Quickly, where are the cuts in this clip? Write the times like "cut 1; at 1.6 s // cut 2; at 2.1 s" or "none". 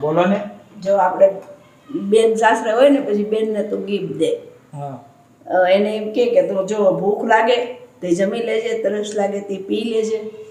none